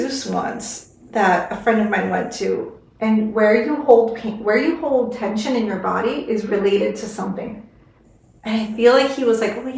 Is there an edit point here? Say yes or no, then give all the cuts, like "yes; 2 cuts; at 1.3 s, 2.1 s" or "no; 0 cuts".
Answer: no; 0 cuts